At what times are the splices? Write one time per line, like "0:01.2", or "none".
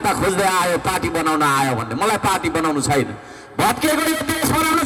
none